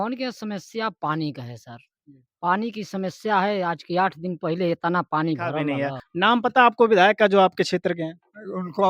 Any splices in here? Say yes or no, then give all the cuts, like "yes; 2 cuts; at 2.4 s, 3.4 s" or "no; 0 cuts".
yes; 1 cut; at 5.7 s